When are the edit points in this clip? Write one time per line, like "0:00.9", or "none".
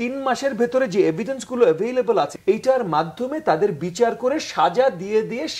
0:02.4